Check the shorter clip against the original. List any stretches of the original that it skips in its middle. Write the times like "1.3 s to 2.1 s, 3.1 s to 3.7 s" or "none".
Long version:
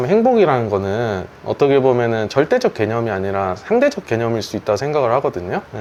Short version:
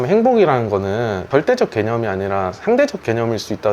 1.2 s to 2.3 s